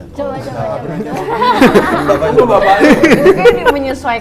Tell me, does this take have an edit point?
no; 0 cuts

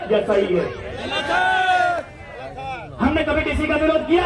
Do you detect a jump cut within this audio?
no; 0 cuts

